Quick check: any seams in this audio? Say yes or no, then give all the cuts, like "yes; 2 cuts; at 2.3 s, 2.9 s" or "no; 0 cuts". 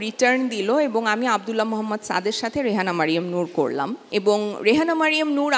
yes; 1 cut; at 4.0 s